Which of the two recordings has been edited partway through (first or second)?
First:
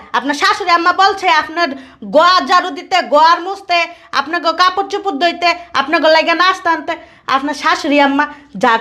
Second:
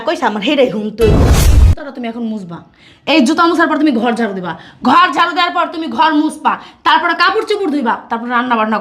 second